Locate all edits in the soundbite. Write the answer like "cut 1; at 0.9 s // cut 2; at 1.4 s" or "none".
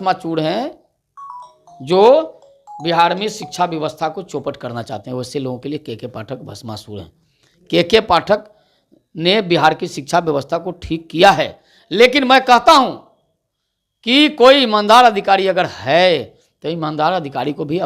none